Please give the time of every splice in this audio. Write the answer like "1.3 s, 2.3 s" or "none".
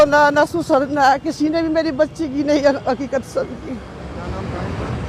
none